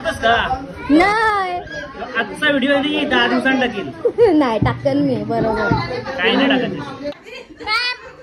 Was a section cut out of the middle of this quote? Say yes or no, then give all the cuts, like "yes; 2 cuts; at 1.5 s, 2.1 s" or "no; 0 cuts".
yes; 1 cut; at 7.1 s